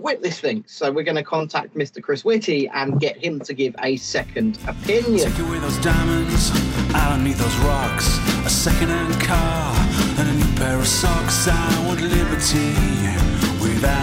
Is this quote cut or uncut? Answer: cut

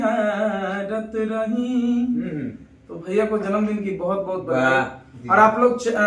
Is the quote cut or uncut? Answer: uncut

